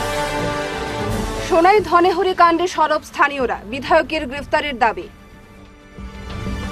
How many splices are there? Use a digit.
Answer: 1